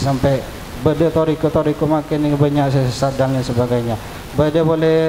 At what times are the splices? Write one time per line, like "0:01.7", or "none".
none